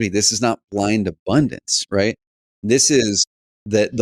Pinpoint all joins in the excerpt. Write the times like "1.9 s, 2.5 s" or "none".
none